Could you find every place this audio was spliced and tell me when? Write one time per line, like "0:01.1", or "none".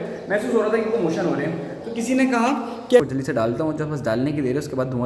0:03.0